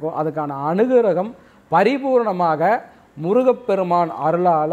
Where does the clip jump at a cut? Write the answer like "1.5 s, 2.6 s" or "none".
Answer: none